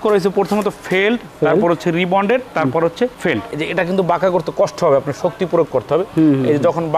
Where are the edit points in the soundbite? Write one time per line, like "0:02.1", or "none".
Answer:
0:03.5